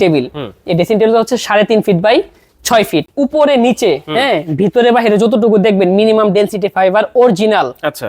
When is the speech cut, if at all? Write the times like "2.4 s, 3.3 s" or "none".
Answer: 3.1 s